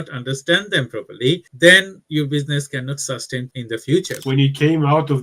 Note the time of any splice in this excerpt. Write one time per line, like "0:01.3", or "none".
0:04.1